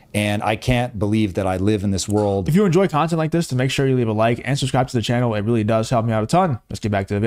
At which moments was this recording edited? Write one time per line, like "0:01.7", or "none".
0:02.4